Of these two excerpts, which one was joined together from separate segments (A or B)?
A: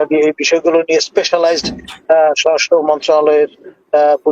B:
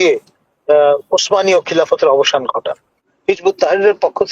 B